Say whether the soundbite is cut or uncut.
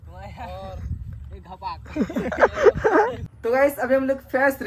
cut